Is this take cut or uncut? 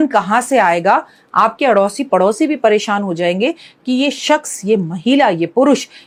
uncut